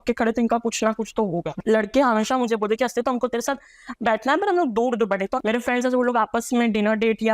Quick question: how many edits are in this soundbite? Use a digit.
2